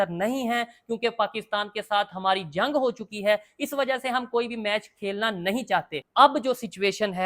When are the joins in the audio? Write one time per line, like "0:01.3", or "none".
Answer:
0:06.0